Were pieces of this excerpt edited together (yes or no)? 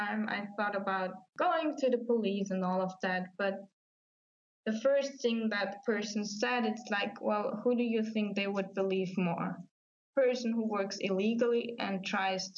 yes